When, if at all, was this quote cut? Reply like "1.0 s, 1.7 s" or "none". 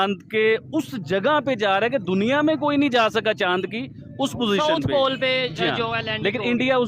none